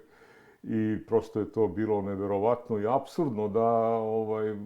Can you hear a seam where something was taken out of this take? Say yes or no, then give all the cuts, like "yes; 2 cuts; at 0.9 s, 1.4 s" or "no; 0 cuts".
no; 0 cuts